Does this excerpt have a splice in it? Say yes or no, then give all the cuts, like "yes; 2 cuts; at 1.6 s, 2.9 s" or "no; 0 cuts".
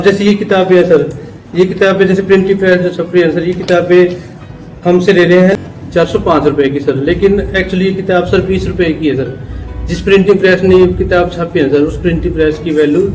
yes; 1 cut; at 5.5 s